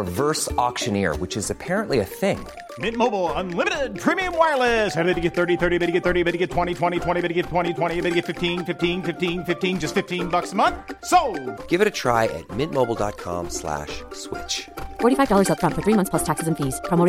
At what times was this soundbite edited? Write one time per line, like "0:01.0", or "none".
none